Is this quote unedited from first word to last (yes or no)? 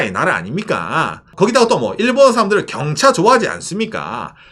no